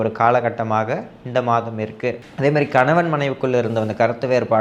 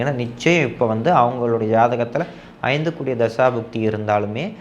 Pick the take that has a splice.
first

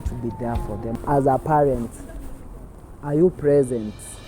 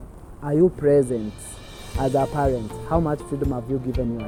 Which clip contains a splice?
first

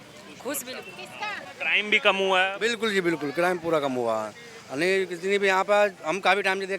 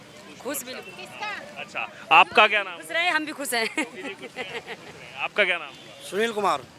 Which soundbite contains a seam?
first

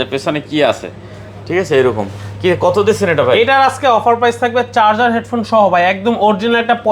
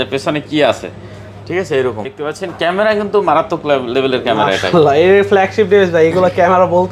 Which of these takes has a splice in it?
second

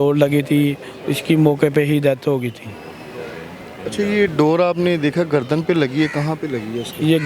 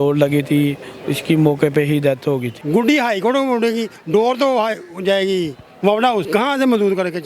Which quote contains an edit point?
second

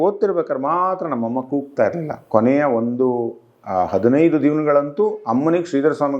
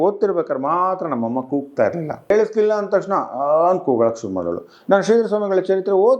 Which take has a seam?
second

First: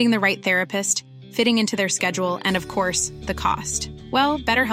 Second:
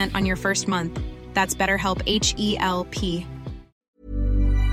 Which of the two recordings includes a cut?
second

